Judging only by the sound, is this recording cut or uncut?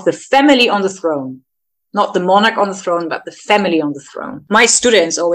cut